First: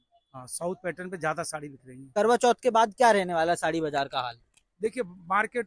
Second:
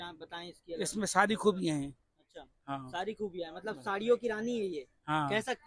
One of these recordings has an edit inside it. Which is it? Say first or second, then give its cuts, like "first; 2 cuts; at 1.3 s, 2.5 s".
first; 1 cut; at 2.1 s